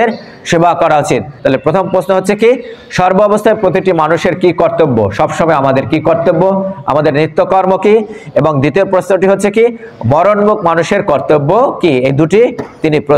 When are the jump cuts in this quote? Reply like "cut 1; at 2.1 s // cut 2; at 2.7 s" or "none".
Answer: cut 1; at 1.3 s